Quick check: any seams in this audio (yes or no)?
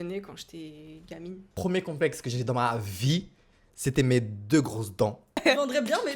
yes